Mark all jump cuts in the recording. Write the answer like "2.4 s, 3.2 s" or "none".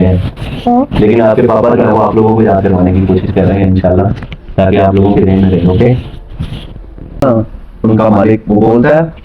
7.2 s